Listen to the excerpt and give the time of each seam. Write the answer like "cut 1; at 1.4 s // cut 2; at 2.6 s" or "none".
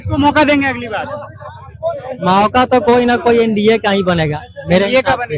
none